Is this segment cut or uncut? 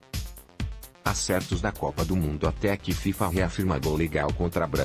cut